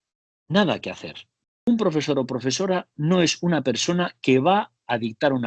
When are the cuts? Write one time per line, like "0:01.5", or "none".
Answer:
0:01.7